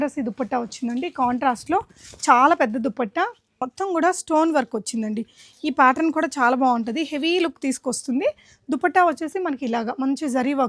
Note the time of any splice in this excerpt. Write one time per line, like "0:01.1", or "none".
0:03.6